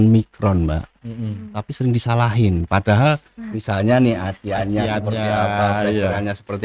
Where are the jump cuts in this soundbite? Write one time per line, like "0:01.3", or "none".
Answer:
none